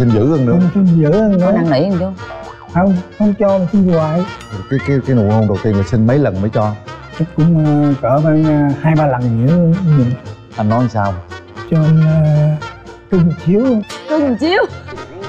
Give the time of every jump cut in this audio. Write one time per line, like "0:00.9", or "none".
none